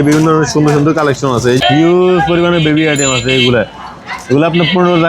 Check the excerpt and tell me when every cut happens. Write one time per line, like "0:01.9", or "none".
0:01.6